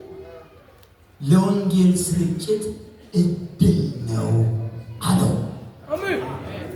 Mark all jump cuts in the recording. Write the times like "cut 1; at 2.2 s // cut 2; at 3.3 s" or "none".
none